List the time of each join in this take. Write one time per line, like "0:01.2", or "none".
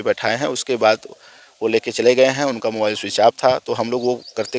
none